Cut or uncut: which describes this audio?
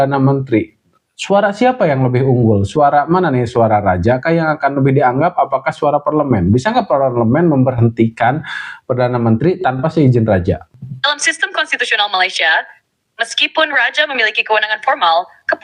uncut